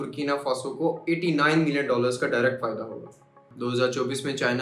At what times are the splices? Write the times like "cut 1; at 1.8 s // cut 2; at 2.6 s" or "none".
cut 1; at 3.4 s